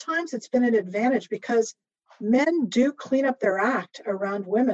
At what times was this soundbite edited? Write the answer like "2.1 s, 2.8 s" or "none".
none